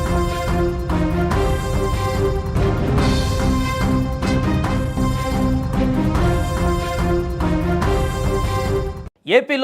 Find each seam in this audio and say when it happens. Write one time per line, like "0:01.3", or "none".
none